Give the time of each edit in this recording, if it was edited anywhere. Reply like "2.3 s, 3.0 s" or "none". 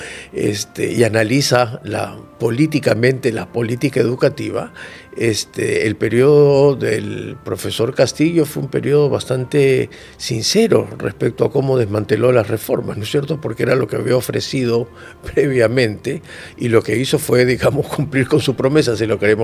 none